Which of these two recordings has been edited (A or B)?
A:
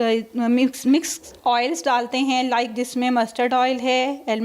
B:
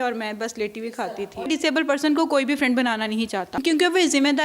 B